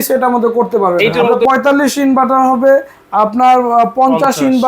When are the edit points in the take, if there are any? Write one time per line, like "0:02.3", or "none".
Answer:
0:01.3